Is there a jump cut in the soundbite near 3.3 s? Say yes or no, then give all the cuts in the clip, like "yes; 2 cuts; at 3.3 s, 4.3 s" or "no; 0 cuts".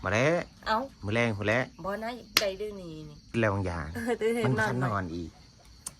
yes; 1 cut; at 3.3 s